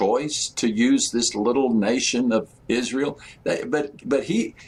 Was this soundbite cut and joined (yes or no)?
no